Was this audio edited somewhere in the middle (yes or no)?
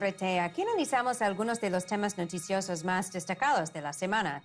no